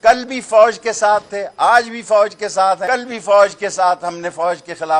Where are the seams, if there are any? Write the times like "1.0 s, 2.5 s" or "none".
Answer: 2.8 s